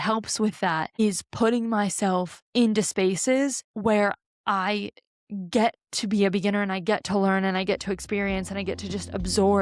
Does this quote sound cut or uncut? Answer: cut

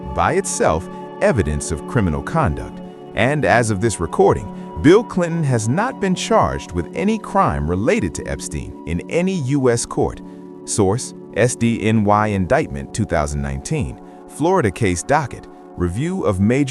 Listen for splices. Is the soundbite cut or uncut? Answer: uncut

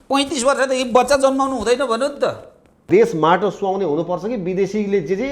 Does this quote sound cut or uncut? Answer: cut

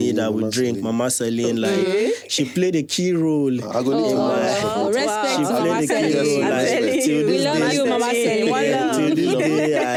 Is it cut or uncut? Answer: uncut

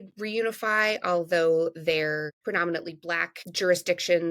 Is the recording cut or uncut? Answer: cut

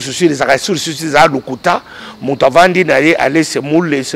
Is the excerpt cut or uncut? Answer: uncut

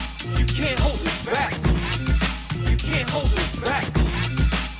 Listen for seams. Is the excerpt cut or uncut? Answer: uncut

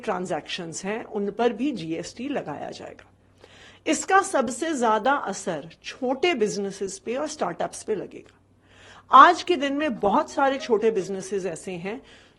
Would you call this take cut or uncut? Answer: uncut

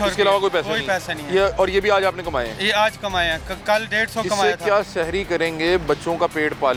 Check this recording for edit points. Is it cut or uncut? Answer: uncut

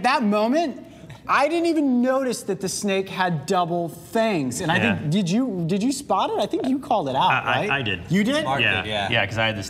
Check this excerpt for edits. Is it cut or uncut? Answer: uncut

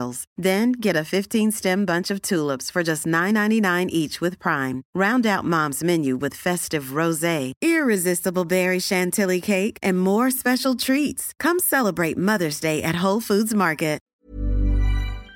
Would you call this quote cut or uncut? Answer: cut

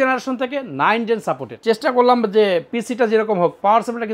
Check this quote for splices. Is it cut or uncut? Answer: cut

